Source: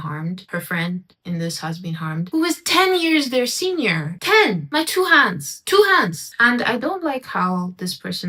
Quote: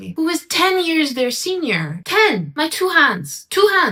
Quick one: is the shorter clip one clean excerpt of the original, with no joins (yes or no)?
yes